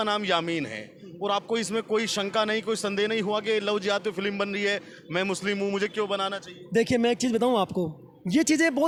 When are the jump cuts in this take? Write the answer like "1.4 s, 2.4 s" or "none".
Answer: none

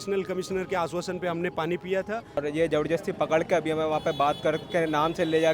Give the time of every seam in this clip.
2.4 s

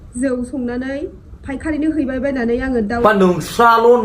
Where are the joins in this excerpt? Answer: 2.9 s

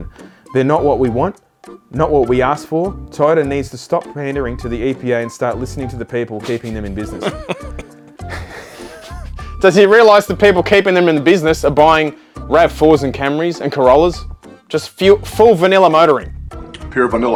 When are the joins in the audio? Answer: none

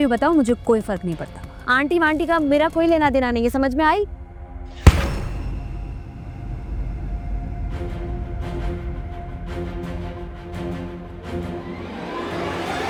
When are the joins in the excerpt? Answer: none

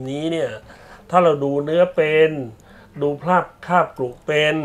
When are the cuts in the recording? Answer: none

